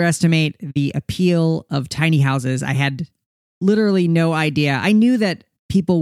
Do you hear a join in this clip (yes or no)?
no